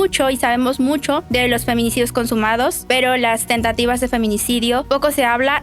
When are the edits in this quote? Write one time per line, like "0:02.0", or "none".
0:01.2
0:02.8
0:04.8